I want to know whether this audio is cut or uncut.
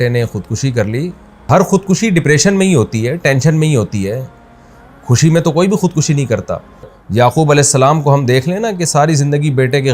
cut